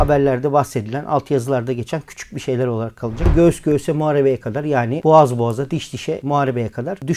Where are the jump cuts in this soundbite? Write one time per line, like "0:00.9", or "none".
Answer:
0:03.3
0:06.2